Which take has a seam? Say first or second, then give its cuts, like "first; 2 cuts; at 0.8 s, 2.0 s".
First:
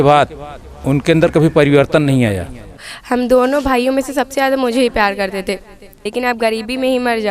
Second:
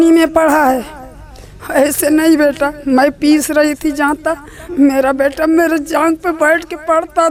first; 2 cuts; at 2.9 s, 6.0 s